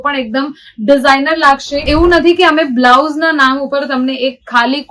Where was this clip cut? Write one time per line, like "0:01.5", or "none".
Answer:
0:01.9